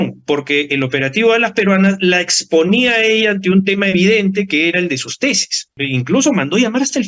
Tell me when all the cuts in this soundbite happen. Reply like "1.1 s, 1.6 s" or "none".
5.8 s